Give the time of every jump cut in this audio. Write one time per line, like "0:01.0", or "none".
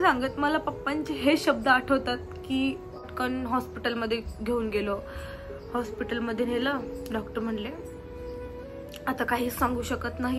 0:03.0